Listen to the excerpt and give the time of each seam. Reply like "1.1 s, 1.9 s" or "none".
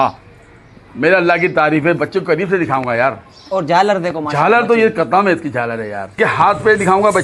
6.1 s